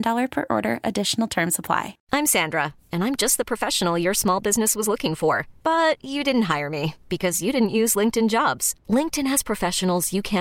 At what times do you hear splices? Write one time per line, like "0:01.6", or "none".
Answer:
0:02.0